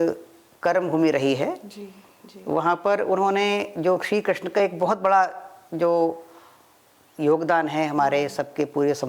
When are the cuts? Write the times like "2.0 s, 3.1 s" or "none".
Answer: none